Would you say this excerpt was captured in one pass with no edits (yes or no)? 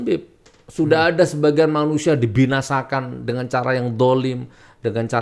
yes